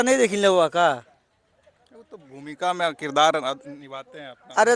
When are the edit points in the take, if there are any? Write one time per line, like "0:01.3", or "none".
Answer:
none